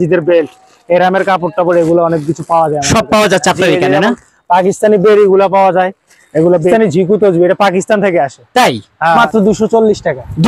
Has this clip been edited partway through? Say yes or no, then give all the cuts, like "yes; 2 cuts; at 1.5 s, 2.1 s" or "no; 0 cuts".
yes; 2 cuts; at 6.7 s, 9.2 s